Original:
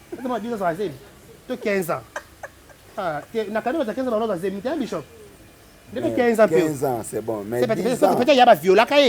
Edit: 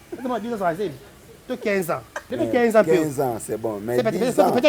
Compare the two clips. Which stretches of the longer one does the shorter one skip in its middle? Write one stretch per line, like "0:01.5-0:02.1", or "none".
0:02.1-0:05.8